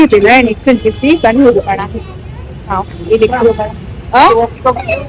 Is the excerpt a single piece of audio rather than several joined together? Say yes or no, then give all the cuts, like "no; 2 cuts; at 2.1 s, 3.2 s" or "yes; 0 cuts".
yes; 0 cuts